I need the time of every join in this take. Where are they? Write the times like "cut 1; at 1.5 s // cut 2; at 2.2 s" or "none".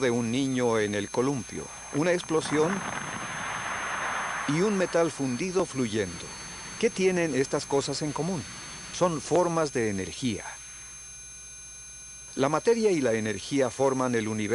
cut 1; at 9.0 s